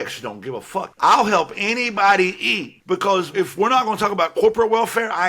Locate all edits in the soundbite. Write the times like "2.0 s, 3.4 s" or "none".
0.9 s, 3.3 s

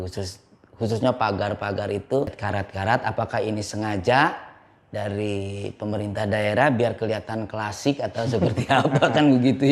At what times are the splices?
2.4 s

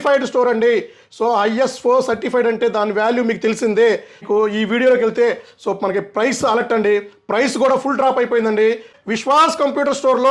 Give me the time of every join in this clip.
4.2 s, 8.9 s

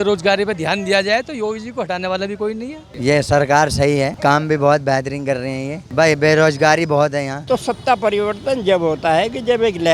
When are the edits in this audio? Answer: 2.9 s, 7.4 s

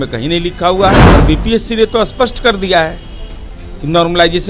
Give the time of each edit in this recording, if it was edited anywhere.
1.1 s

